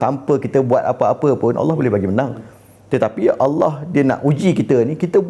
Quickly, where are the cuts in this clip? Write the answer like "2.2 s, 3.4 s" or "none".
none